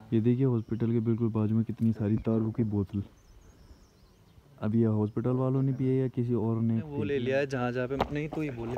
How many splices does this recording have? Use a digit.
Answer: 1